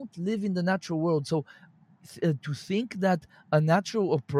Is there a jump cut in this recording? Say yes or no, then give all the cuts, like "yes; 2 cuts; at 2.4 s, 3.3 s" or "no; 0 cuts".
no; 0 cuts